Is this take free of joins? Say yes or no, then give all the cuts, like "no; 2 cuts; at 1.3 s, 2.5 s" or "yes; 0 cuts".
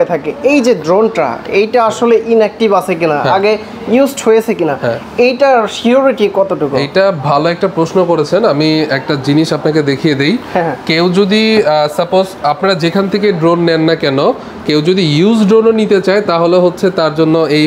yes; 0 cuts